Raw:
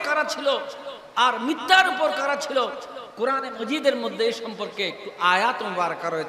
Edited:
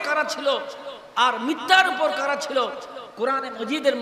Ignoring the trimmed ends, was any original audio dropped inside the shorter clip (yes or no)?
no